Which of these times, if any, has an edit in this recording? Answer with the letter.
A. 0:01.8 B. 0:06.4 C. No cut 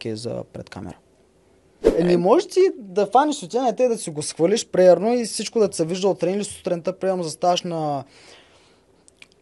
A